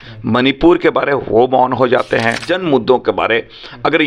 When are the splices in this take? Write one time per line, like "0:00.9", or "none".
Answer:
0:02.5